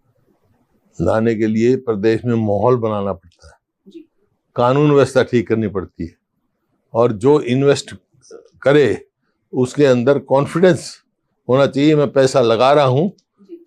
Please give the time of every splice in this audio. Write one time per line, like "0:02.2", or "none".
none